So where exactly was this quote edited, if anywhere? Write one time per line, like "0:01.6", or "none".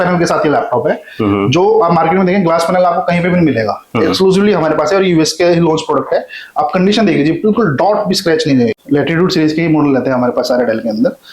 0:08.8